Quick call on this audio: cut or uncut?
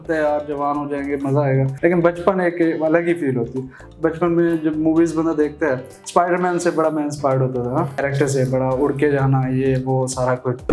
cut